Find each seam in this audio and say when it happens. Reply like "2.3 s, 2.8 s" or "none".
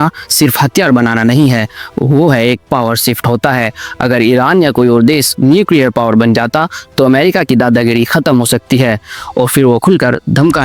none